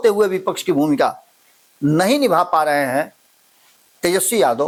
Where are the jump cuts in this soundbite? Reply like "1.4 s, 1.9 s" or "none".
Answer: none